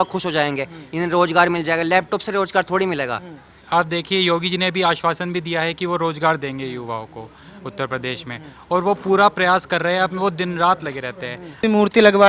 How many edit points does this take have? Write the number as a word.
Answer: two